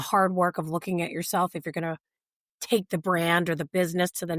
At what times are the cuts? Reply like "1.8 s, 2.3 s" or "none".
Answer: none

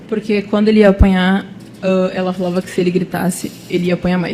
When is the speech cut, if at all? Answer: none

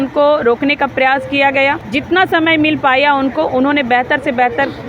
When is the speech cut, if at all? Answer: 1.8 s

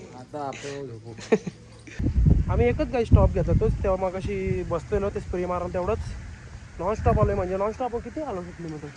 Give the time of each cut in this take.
2.0 s

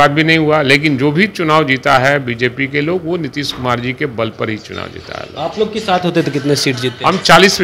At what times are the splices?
none

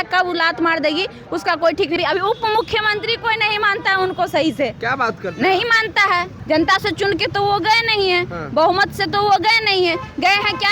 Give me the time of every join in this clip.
2.0 s, 6.4 s

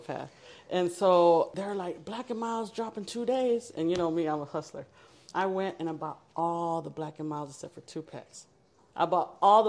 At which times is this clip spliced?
1.5 s

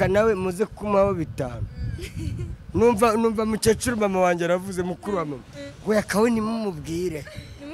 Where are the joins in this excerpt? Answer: none

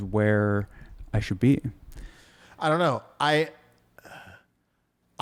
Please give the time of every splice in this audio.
none

